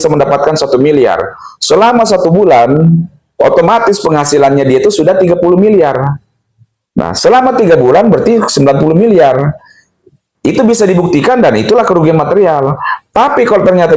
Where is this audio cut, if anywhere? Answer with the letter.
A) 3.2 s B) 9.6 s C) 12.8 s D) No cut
D